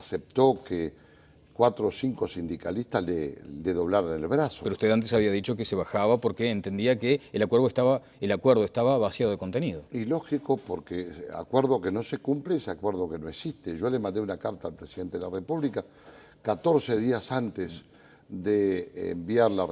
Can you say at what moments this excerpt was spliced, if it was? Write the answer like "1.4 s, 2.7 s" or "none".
7.7 s